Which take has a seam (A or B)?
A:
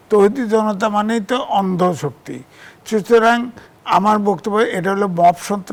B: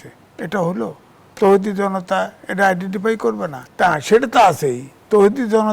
B